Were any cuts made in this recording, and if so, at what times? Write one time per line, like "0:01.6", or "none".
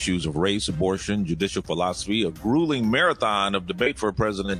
none